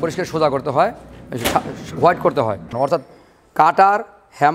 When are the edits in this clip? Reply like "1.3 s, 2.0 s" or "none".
2.7 s